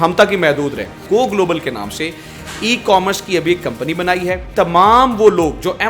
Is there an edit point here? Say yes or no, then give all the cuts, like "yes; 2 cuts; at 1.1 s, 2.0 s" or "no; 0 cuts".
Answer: yes; 2 cuts; at 1.0 s, 4.5 s